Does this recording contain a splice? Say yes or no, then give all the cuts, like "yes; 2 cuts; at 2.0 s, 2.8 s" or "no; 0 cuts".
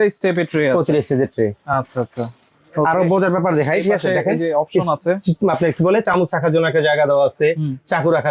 no; 0 cuts